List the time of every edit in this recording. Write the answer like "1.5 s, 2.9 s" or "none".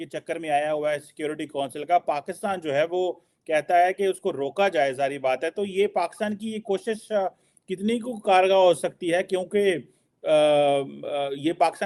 none